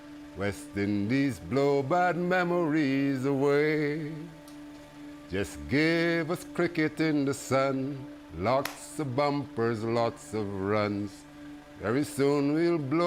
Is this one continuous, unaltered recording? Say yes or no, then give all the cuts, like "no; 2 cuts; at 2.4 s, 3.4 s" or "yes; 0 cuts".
yes; 0 cuts